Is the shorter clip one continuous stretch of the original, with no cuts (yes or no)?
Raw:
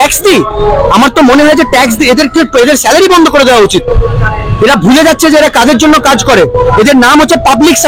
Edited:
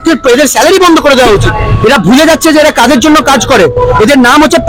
no